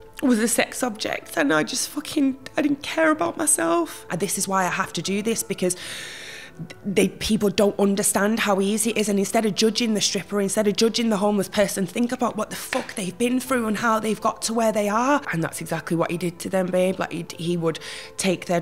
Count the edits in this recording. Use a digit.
2